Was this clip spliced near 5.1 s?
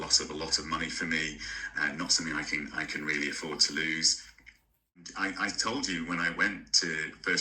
yes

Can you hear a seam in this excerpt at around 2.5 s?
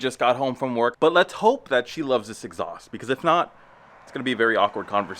no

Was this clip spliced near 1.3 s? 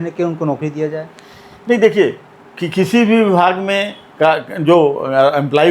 no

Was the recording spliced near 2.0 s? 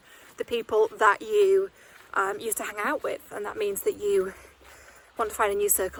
no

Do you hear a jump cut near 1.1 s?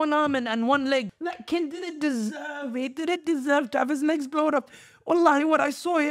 yes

